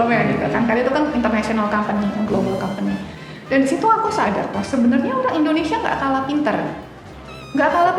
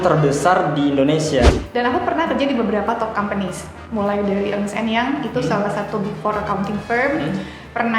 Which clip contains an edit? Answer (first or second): second